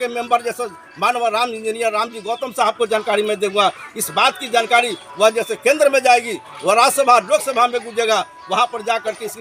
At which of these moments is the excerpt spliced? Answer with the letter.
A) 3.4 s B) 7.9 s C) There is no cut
C